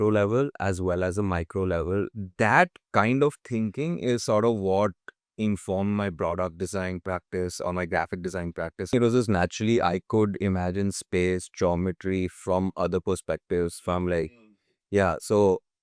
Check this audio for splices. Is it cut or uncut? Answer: cut